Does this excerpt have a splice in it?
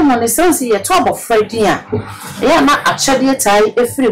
no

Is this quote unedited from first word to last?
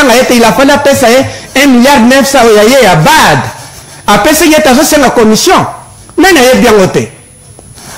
yes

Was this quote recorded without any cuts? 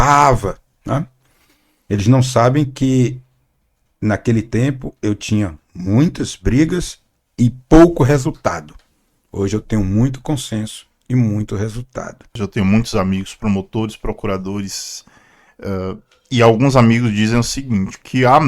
no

